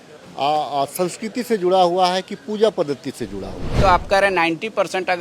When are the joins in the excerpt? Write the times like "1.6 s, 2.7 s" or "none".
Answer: 3.8 s